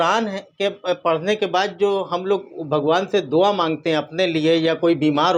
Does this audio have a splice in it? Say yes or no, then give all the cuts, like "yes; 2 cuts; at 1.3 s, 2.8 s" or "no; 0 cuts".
no; 0 cuts